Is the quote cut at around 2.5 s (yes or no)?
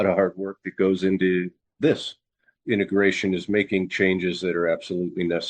yes